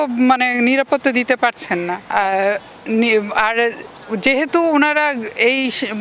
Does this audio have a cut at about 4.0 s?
no; 1 cut; at 2.0 s

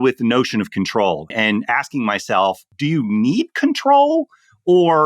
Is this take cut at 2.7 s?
yes; 2 cuts; at 1.3 s, 2.7 s

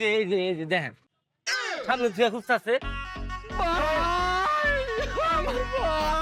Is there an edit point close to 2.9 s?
no; 0 cuts

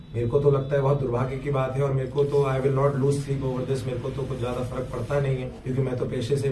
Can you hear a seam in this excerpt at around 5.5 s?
yes; 1 cut; at 5.5 s

